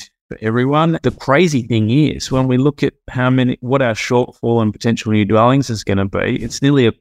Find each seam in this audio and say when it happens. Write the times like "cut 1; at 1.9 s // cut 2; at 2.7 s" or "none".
cut 1; at 1.0 s